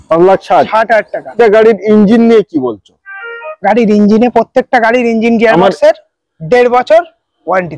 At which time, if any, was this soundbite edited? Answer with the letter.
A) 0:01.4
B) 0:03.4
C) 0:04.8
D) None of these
A